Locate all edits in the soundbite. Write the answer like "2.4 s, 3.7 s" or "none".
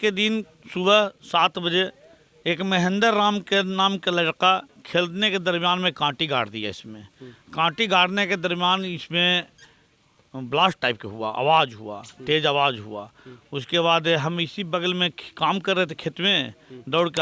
none